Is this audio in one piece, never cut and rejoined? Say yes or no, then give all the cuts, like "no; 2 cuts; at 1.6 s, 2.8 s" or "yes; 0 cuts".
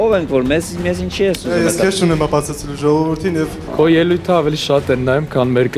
no; 1 cut; at 3.6 s